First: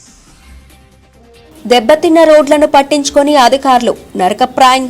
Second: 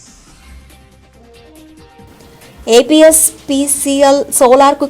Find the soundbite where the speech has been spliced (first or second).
first